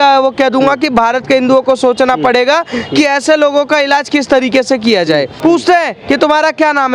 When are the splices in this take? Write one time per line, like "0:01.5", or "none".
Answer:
0:05.3